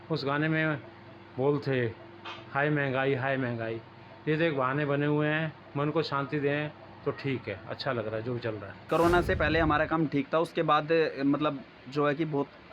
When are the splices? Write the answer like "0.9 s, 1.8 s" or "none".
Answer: 8.9 s